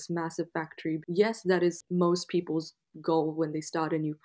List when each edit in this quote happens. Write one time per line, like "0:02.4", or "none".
0:01.0
0:01.8